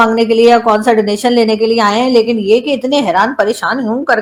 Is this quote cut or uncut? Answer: uncut